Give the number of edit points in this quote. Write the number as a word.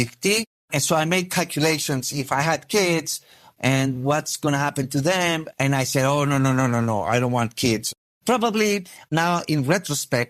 one